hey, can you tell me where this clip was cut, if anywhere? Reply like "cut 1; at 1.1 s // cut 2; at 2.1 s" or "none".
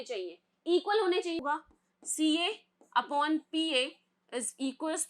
cut 1; at 1.4 s